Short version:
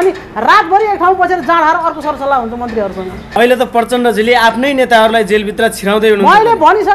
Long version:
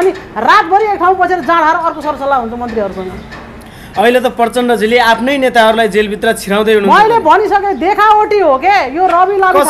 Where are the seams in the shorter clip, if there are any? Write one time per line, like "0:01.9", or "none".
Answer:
0:03.4